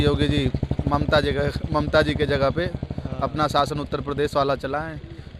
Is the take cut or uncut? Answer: uncut